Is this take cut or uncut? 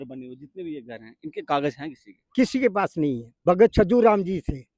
cut